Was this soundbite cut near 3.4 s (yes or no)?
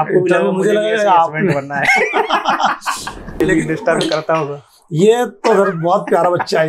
yes